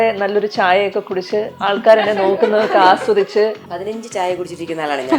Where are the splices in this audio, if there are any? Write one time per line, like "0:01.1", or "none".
0:03.6